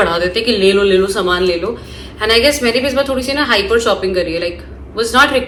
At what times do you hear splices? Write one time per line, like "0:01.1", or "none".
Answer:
none